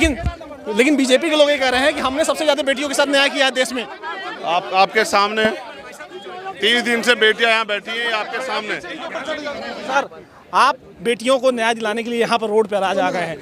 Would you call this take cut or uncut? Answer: uncut